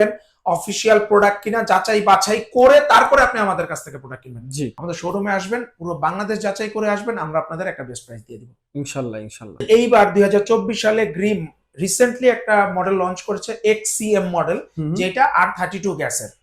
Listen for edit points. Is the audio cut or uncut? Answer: cut